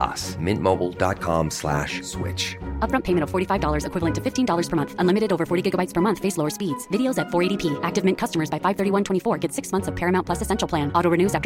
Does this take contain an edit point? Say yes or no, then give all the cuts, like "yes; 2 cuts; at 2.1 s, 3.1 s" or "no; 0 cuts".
no; 0 cuts